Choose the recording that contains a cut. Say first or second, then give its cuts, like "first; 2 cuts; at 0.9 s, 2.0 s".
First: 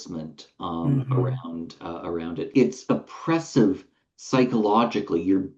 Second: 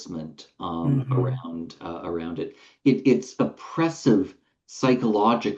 first; 1 cut; at 2.5 s